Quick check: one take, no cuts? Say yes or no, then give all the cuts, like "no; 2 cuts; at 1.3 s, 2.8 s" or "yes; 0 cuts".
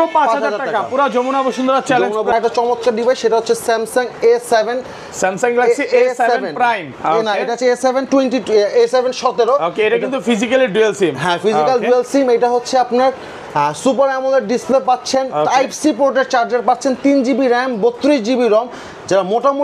no; 1 cut; at 2.3 s